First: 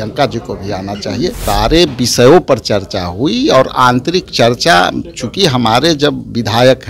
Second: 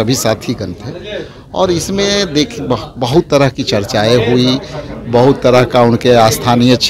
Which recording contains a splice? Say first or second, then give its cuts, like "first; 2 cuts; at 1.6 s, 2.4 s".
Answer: first; 1 cut; at 1.4 s